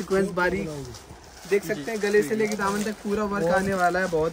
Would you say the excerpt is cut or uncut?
uncut